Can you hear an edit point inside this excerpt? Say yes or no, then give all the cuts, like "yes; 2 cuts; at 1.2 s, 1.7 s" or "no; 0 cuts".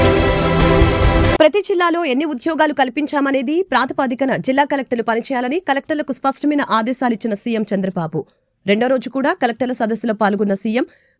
yes; 1 cut; at 1.4 s